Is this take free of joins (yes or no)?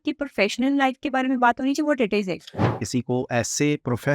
no